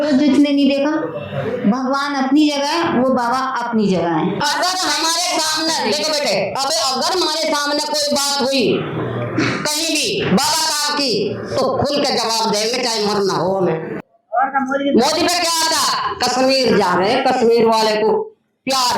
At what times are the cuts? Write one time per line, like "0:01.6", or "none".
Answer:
0:04.4
0:14.0

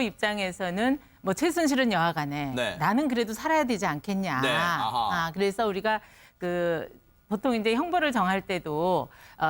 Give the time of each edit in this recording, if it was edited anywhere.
0:05.3

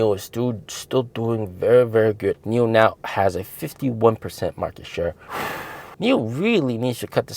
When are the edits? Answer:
0:02.3
0:05.8

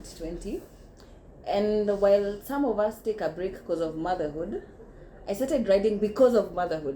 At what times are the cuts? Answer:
none

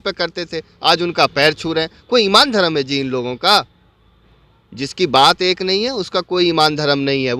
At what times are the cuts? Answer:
none

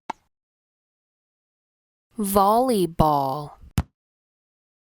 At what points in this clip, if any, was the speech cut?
none

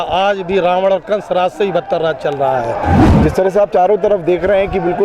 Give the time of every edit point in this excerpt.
0:03.1

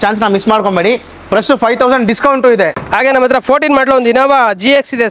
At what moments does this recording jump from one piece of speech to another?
0:02.8

